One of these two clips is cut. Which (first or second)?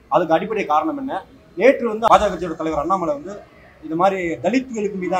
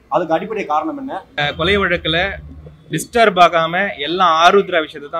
second